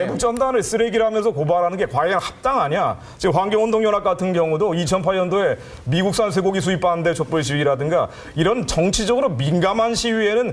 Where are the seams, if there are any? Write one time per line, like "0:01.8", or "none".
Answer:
0:04.7